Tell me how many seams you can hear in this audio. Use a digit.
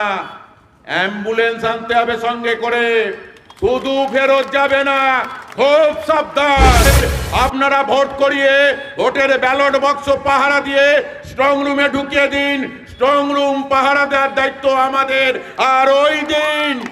1